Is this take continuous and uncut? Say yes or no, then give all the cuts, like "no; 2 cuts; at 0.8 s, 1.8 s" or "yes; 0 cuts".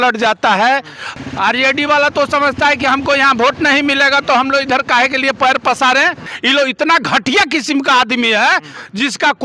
no; 2 cuts; at 1.0 s, 6.3 s